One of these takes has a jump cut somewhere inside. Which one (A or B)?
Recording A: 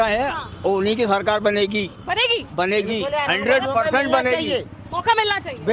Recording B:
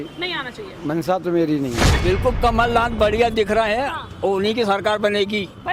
B